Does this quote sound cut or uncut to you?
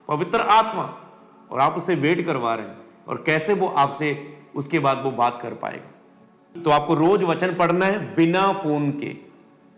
cut